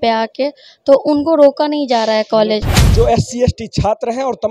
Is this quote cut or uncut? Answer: cut